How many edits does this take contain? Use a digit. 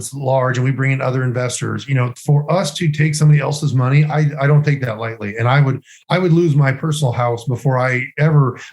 0